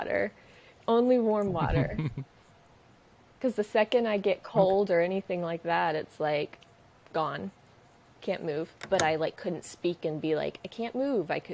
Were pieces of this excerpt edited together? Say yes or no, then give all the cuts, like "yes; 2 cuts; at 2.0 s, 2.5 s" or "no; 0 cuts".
yes; 1 cut; at 8.8 s